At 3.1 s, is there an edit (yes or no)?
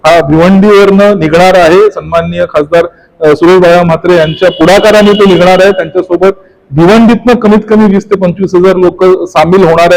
no